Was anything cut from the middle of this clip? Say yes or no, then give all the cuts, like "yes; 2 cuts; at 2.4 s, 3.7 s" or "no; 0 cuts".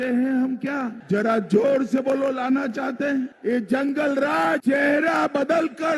yes; 3 cuts; at 1.0 s, 3.3 s, 4.6 s